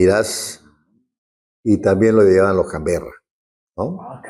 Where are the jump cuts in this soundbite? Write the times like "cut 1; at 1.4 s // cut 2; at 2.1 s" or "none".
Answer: none